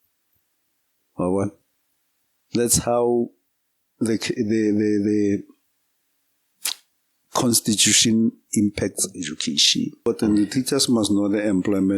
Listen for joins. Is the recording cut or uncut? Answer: cut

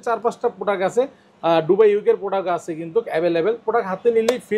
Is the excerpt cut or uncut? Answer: uncut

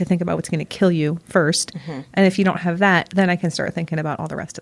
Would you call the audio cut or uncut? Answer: uncut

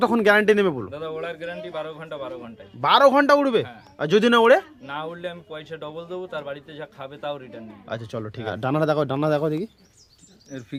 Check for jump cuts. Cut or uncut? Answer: uncut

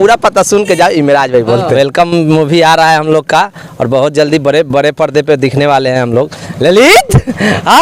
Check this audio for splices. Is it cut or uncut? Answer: cut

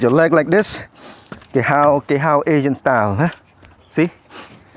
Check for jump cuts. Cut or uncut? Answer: uncut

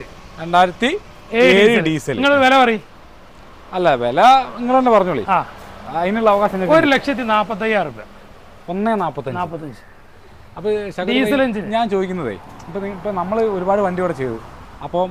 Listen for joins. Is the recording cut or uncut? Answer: uncut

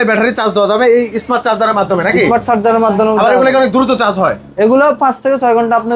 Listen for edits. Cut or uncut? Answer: uncut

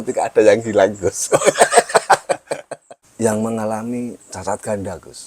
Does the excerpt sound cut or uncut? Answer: cut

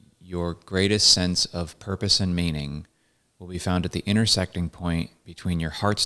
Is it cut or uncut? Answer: uncut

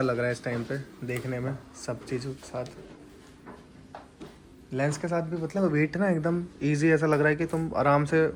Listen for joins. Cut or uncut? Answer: uncut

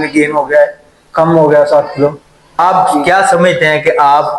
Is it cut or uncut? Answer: cut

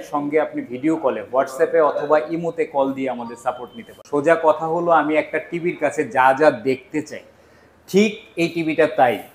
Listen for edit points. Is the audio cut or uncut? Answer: cut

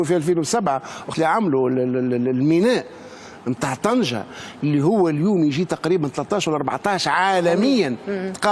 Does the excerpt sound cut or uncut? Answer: cut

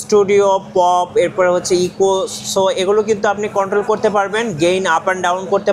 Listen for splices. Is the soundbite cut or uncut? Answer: uncut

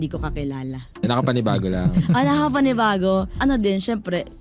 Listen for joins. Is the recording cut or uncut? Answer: cut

